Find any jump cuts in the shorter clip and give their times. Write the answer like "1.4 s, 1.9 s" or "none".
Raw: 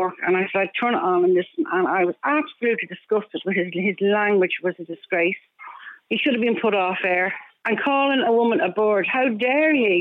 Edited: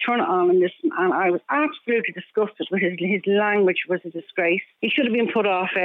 4.7 s